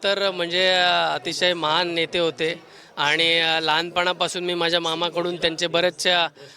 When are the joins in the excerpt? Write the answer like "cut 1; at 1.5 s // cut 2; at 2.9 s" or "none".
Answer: none